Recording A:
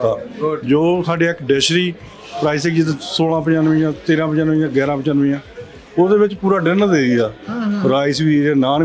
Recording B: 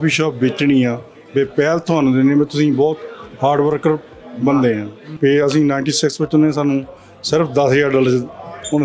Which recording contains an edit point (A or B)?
B